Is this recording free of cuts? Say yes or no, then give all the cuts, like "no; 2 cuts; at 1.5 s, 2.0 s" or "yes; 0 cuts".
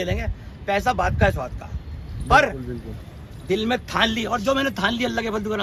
yes; 0 cuts